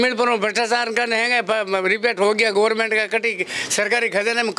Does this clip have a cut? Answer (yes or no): no